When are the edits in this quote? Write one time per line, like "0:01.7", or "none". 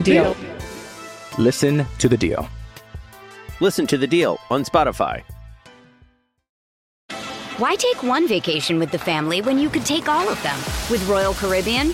0:07.0

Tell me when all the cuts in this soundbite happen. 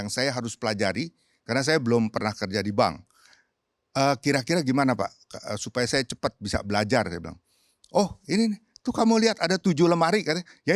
none

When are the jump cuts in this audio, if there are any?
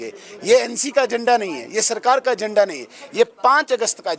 none

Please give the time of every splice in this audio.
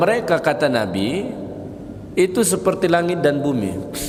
none

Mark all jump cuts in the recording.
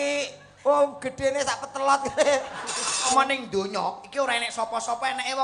0:03.1

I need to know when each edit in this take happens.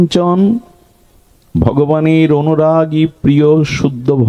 none

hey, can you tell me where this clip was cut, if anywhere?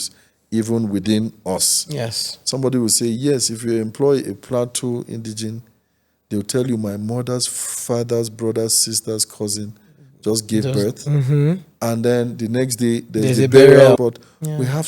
0:14.0

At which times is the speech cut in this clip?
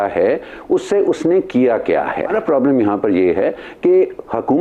0:02.3

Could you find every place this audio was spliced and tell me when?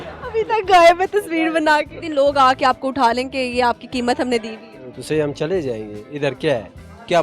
0:02.0

